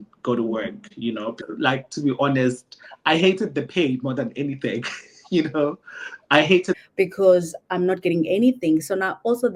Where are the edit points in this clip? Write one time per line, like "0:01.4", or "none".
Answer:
0:01.4
0:06.8